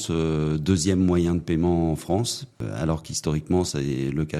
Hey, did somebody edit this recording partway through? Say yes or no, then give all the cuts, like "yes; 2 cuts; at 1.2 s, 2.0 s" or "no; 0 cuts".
yes; 1 cut; at 2.7 s